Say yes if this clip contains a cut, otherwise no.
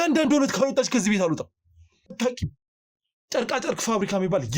yes